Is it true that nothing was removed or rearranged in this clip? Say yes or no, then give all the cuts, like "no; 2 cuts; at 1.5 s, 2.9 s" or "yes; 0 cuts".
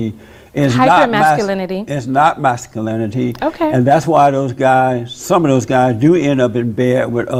yes; 0 cuts